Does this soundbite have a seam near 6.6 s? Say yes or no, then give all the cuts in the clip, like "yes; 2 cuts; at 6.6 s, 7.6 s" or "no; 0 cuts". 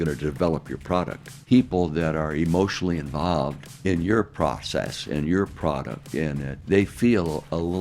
yes; 3 cuts; at 1.4 s, 3.7 s, 6.6 s